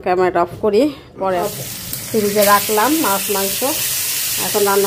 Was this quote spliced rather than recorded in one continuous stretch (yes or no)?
yes